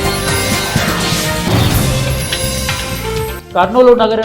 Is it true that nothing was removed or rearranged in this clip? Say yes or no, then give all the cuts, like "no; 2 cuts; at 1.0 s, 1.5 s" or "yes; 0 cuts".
no; 1 cut; at 3.3 s